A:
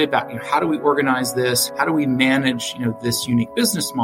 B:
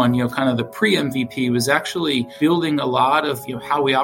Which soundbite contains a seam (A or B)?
A